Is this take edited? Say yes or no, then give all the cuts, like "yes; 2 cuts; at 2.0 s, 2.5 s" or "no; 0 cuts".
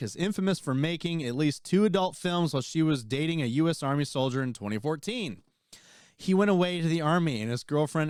no; 0 cuts